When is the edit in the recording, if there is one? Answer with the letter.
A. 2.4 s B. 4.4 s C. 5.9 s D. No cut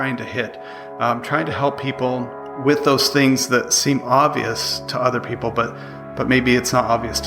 A